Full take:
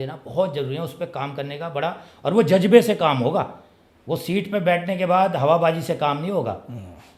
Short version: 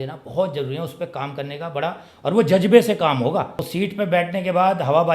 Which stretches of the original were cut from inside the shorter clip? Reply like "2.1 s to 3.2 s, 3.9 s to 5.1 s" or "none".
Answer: 3.6 s to 4.1 s